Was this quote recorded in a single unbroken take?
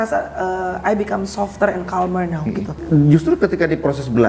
no; 1 cut; at 2.7 s

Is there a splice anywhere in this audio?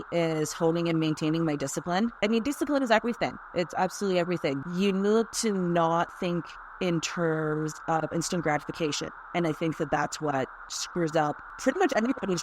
yes; 3 cuts; at 2.2 s, 4.6 s, 11.5 s

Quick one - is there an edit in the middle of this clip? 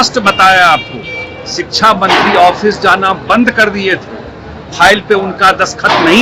no; 0 cuts

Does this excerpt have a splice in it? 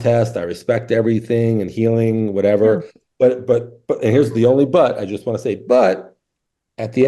no; 0 cuts

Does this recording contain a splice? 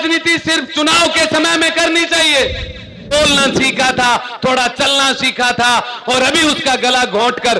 yes; 1 cut; at 3.1 s

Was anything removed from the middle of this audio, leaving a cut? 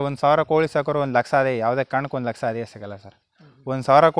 no; 0 cuts

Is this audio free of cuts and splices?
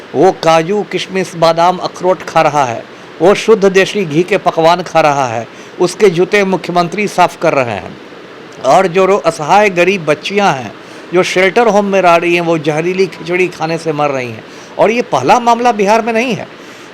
yes; 0 cuts

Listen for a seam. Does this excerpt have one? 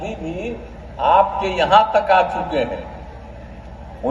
no; 0 cuts

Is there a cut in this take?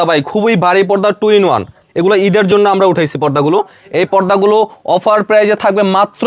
no; 0 cuts

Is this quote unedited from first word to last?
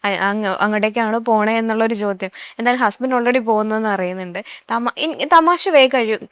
yes; 0 cuts

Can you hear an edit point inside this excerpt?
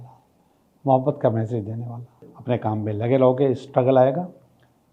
yes; 1 cut; at 2.3 s

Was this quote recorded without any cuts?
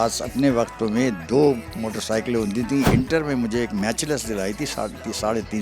no; 1 cut; at 2.9 s

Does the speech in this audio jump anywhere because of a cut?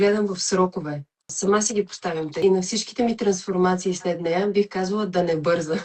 yes; 2 cuts; at 1.3 s, 2.4 s

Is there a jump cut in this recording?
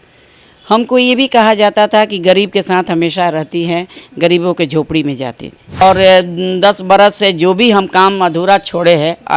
yes; 1 cut; at 5.8 s

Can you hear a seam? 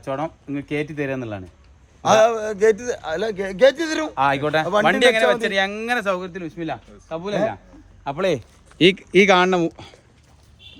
no; 0 cuts

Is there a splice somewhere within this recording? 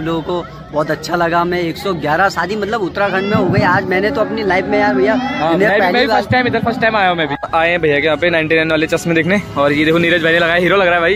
yes; 1 cut; at 7.4 s

